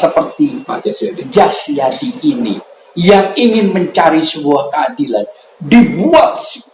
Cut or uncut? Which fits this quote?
uncut